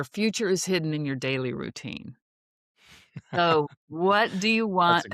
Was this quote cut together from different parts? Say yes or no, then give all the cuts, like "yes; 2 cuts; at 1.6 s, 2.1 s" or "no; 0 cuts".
no; 0 cuts